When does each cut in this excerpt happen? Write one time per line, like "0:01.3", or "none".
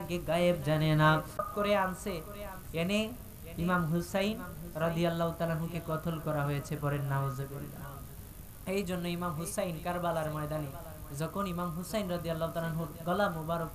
0:01.4